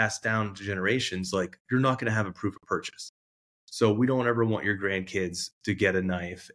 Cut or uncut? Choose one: uncut